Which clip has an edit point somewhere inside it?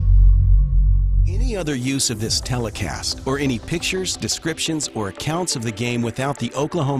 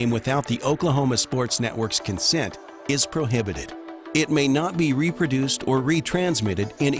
first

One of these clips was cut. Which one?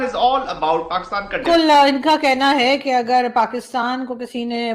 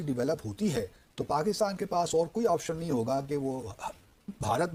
first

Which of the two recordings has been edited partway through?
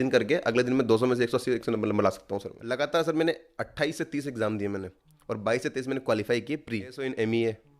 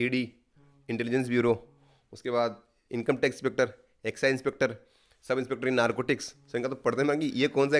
first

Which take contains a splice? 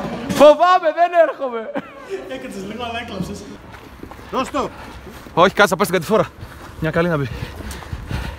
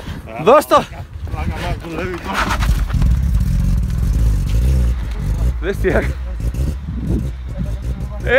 first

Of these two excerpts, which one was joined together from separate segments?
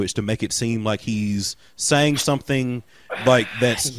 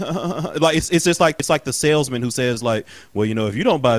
second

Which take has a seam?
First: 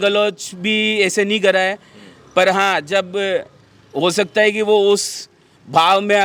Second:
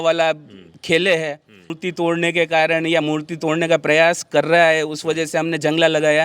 second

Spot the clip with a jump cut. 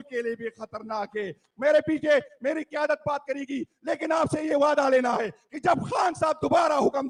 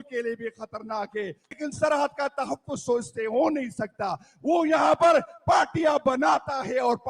second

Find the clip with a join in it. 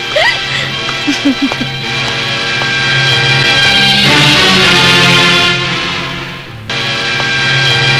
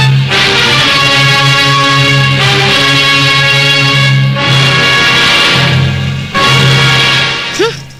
first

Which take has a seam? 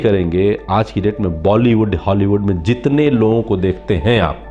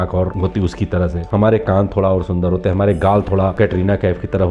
second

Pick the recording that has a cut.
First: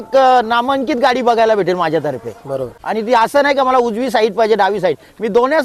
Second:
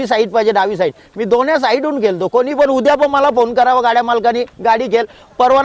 first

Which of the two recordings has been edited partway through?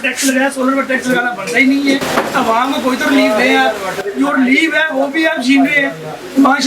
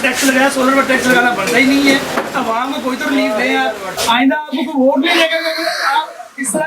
second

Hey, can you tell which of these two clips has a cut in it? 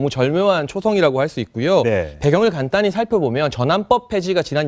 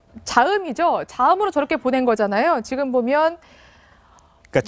second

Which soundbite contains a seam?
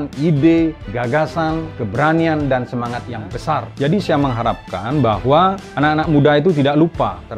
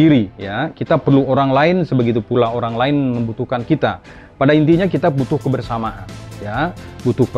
first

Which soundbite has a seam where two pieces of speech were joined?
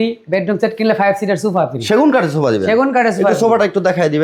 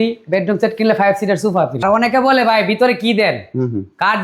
second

